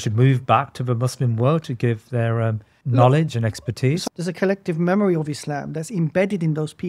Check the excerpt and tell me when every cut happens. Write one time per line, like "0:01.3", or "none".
0:02.7
0:04.0